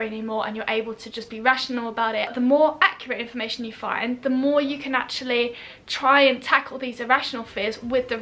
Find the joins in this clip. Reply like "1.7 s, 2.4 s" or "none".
2.3 s